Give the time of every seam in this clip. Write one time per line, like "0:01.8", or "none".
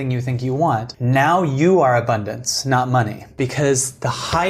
0:00.9
0:03.3